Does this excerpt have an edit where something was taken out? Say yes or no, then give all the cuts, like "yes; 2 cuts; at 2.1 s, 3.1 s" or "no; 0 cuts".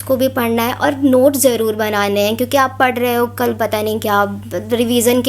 no; 0 cuts